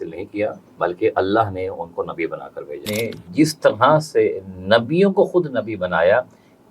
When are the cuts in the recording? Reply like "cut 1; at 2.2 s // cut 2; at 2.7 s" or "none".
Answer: cut 1; at 2.9 s